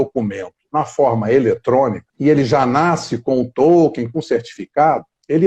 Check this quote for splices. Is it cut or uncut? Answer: cut